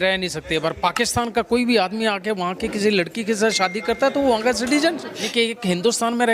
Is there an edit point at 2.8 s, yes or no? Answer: no